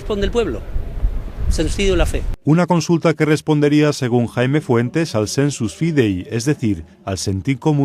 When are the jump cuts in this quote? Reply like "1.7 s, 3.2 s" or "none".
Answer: 2.3 s

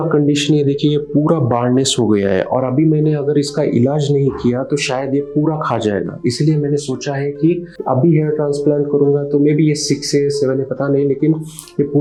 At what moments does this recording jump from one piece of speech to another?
none

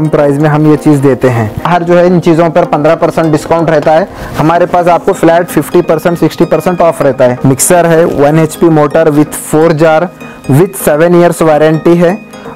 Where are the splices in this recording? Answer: 1.7 s, 7.4 s

